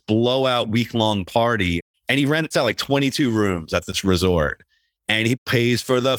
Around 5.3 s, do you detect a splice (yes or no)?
yes